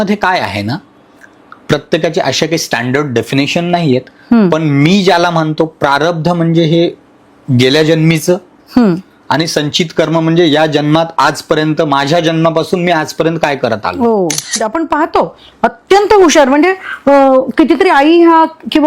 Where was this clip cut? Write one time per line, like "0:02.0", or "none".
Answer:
0:14.6